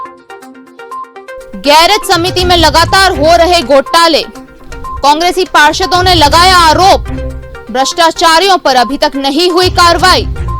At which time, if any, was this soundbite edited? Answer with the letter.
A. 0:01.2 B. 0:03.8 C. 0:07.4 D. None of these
A